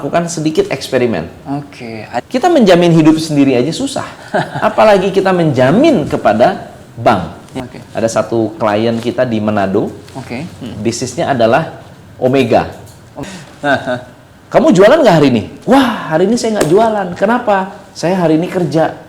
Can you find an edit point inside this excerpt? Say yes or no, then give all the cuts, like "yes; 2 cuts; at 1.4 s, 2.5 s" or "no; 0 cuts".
yes; 3 cuts; at 2.1 s, 7.5 s, 13.2 s